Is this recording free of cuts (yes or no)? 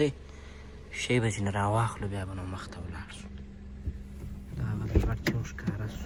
yes